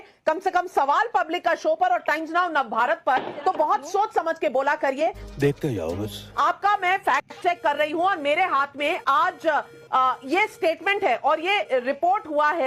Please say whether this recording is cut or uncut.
uncut